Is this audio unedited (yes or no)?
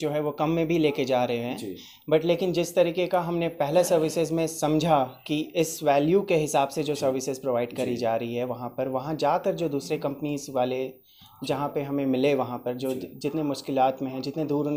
yes